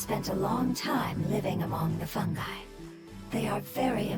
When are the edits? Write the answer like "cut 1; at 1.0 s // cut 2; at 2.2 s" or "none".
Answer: none